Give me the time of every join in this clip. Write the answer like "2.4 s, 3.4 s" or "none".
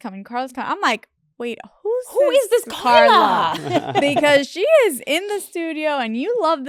none